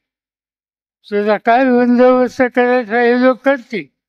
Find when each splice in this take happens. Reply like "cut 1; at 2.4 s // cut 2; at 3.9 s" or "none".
none